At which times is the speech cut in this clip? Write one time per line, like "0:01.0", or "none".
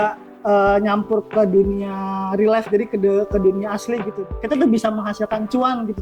0:04.1